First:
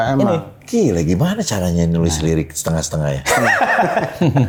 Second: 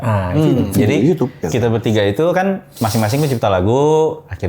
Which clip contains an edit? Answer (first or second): second